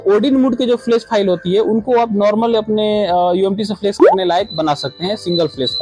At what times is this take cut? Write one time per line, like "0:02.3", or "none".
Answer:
none